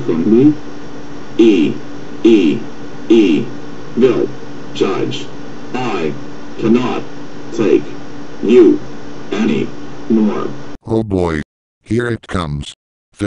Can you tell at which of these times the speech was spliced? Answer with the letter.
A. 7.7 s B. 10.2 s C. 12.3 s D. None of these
A